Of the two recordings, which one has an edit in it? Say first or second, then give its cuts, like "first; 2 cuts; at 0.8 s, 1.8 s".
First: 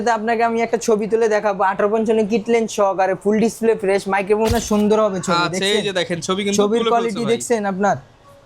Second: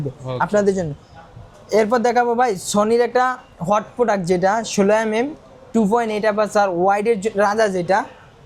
first; 1 cut; at 4.5 s